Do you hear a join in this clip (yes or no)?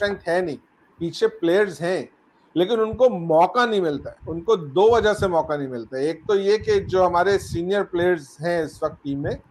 no